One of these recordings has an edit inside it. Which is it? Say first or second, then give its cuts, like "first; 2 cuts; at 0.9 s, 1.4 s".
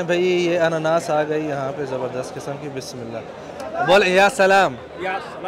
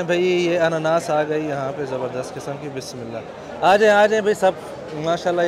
first; 1 cut; at 3.5 s